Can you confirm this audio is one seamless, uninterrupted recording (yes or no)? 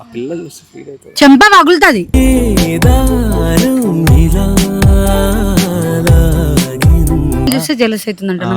no